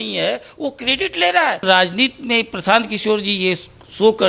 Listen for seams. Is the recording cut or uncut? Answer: cut